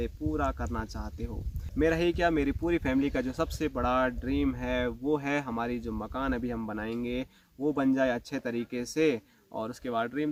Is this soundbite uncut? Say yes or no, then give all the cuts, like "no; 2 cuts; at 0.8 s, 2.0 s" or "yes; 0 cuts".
yes; 0 cuts